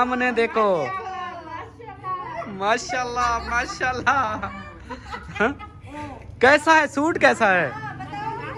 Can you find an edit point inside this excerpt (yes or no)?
no